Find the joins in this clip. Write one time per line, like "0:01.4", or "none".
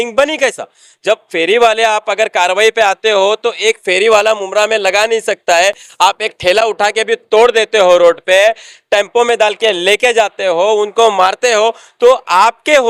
none